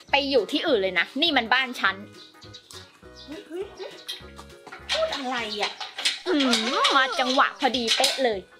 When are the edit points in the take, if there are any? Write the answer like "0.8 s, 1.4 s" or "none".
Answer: none